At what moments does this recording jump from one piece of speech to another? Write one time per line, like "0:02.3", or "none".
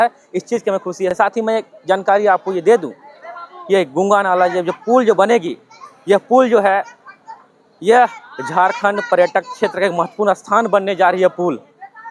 none